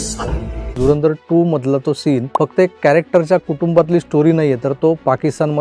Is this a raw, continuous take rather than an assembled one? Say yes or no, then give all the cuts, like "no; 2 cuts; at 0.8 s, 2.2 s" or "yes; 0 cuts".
no; 2 cuts; at 0.7 s, 2.3 s